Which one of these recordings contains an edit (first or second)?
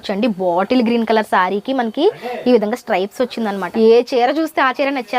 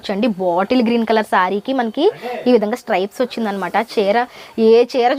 first